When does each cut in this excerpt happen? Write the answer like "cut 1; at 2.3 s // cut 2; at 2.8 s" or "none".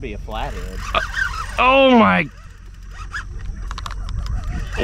none